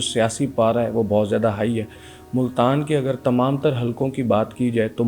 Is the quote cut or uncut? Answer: uncut